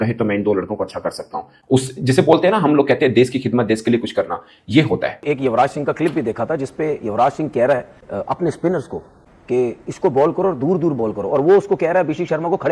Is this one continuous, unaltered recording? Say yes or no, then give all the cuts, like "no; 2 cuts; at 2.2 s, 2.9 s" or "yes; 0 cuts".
no; 1 cut; at 5.2 s